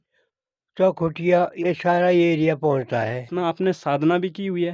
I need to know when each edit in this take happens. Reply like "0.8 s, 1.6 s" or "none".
3.3 s